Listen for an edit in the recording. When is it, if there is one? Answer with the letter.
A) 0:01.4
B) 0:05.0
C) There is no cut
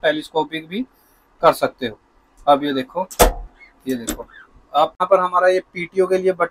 B